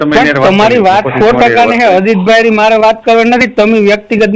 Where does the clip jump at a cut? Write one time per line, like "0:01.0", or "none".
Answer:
0:02.7